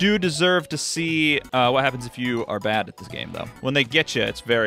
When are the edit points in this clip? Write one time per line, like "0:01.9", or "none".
0:01.4